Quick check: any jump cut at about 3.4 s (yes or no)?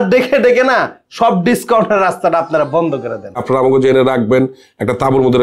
yes